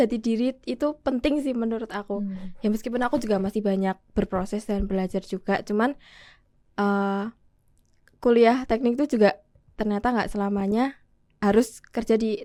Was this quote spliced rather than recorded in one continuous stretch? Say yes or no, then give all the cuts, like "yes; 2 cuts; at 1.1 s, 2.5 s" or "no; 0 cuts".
no; 0 cuts